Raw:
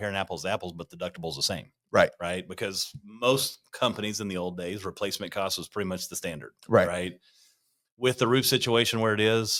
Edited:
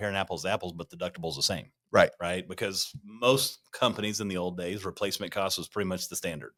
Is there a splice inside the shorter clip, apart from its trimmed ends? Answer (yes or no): no